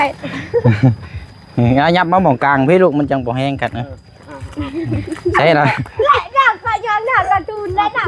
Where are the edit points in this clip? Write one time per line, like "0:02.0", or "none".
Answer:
none